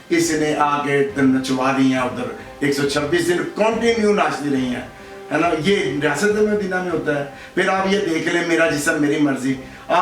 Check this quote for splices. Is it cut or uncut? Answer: uncut